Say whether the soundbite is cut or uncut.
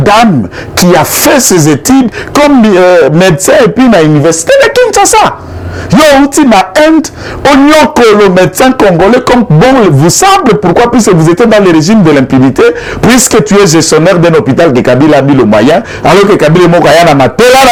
uncut